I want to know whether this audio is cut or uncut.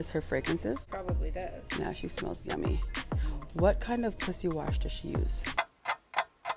uncut